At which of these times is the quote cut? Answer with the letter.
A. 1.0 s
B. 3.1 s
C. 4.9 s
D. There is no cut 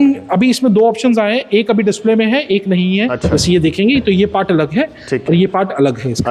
B